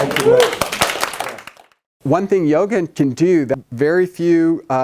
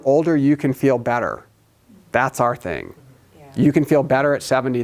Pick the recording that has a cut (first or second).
first